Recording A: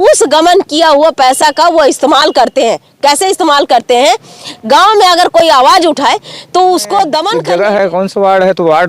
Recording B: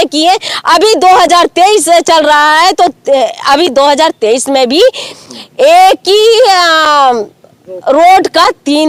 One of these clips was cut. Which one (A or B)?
A